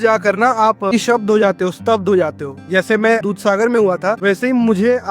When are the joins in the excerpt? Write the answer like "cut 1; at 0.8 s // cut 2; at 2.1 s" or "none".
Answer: cut 1; at 0.9 s // cut 2; at 4.2 s